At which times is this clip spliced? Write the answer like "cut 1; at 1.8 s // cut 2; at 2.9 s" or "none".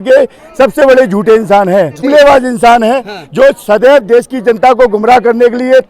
cut 1; at 2.1 s